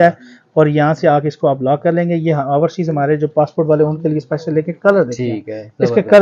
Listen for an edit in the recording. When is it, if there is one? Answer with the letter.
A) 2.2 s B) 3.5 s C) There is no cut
C